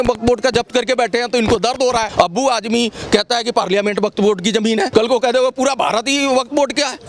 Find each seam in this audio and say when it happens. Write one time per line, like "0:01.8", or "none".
0:02.1
0:04.9